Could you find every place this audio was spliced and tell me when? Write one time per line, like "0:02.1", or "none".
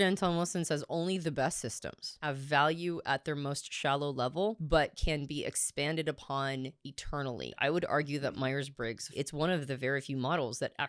0:02.1
0:04.6
0:07.6
0:09.1